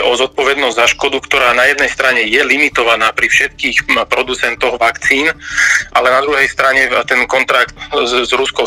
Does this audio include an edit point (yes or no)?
yes